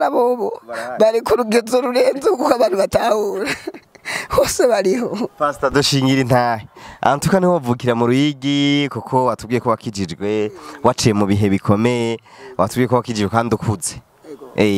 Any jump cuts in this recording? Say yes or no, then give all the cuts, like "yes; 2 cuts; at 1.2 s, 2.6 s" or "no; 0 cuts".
no; 0 cuts